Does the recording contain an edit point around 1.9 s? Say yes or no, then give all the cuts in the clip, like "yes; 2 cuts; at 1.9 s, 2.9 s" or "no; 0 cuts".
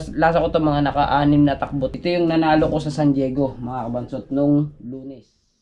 yes; 1 cut; at 1.9 s